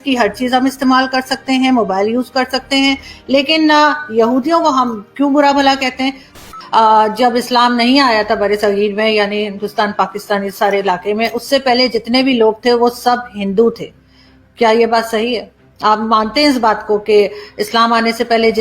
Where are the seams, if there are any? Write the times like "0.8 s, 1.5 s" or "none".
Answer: 6.4 s